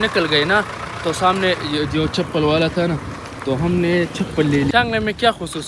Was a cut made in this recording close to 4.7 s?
yes; 1 cut; at 4.7 s

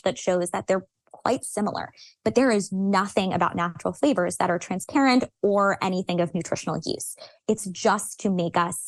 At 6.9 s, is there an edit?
no; 1 cut; at 2.1 s

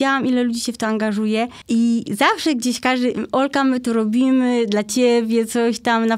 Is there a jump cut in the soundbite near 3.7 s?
no; 1 cut; at 1.6 s

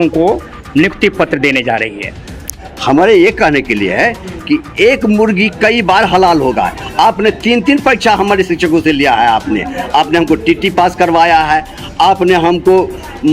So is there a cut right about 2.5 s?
yes; 1 cut; at 2.5 s

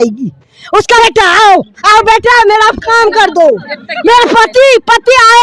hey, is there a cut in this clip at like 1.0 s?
yes; 1 cut; at 1.0 s

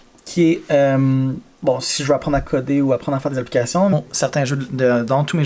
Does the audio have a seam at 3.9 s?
yes; 1 cut; at 3.9 s

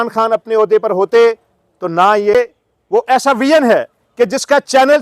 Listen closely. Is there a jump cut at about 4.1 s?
no; 1 cut; at 2.3 s

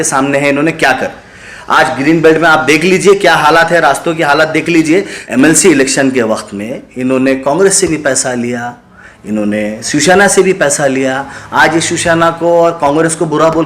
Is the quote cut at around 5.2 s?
yes; 1 cut; at 5.2 s

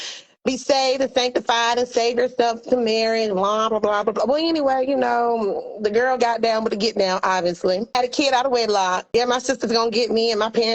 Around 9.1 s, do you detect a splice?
yes; 2 cuts; at 8.0 s, 9.1 s

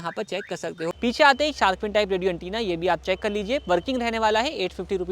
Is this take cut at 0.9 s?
yes; 1 cut; at 0.9 s

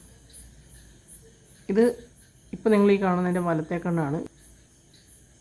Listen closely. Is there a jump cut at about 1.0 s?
no; 1 cut; at 4.2 s

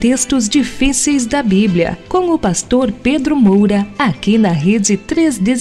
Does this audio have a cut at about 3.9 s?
yes; 1 cut; at 3.9 s

